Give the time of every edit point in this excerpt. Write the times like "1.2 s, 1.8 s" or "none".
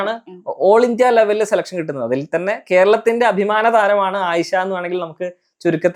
none